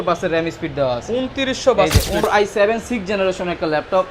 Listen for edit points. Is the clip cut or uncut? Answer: cut